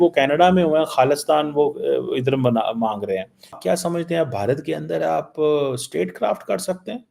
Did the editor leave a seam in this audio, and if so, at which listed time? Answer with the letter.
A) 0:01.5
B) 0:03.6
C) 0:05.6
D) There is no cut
B